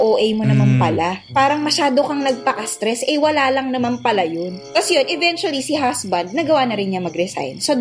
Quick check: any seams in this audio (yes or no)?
yes